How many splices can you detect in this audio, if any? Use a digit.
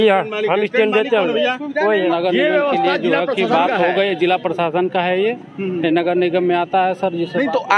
1